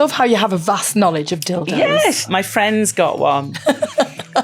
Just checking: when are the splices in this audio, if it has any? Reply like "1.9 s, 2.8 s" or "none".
2.3 s